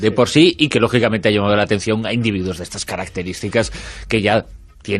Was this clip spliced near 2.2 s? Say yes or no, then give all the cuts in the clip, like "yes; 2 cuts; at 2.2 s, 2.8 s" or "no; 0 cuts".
yes; 1 cut; at 2.2 s